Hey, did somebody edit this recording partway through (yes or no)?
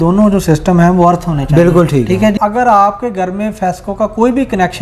yes